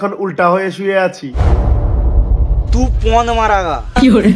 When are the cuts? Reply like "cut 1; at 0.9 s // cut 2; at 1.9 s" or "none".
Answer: cut 1; at 1.4 s